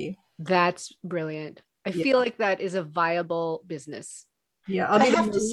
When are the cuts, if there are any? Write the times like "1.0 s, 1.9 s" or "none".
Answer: none